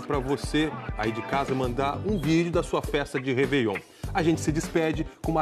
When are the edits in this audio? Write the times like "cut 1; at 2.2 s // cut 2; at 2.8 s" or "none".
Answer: cut 1; at 4.4 s